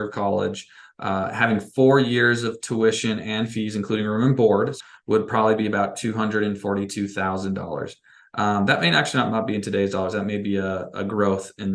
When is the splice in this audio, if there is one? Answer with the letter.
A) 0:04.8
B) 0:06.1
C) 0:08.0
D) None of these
A